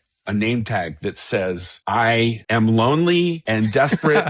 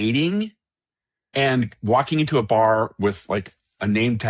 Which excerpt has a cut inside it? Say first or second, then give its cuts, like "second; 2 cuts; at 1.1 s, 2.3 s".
first; 3 cuts; at 1.7 s, 2.4 s, 3.4 s